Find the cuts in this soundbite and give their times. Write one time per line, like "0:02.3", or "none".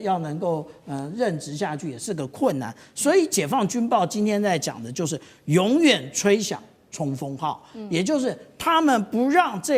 none

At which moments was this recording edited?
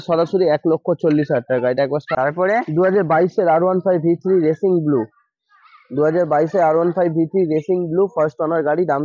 0:02.1

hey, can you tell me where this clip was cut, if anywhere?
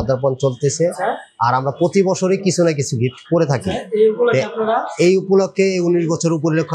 none

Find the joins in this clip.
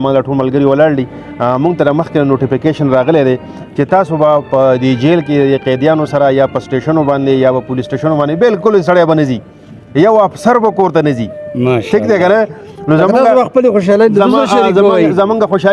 none

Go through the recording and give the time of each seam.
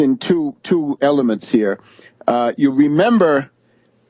0:00.9

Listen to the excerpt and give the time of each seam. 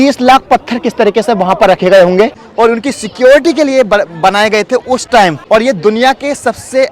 0:02.4
0:05.4

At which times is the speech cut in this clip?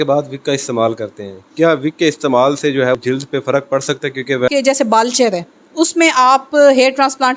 0:03.0
0:04.5

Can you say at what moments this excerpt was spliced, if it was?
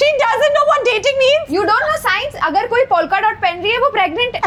none

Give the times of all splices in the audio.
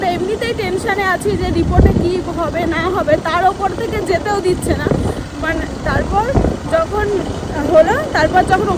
none

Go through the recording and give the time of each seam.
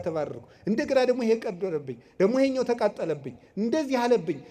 none

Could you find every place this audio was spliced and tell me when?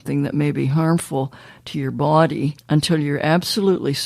0:02.6

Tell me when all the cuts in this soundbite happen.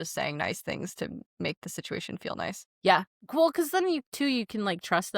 0:02.7

